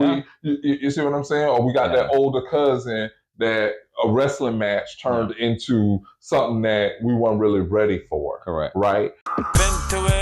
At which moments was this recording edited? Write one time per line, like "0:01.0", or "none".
0:09.2